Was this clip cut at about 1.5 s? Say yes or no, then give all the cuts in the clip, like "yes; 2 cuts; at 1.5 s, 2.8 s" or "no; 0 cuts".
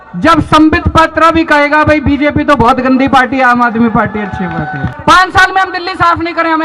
no; 1 cut; at 4.9 s